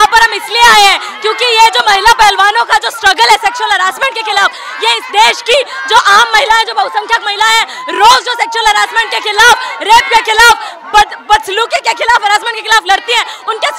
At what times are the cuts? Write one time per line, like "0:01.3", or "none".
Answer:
none